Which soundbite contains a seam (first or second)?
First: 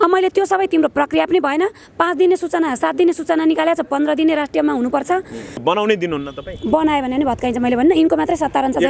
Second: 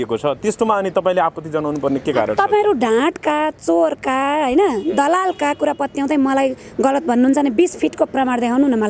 first